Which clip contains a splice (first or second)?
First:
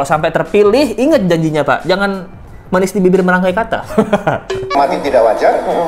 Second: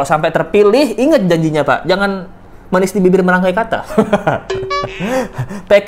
first